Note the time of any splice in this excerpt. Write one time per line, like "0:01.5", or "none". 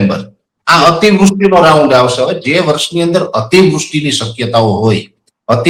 none